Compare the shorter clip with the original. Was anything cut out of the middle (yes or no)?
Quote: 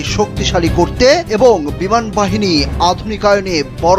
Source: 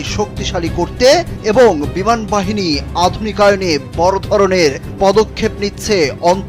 yes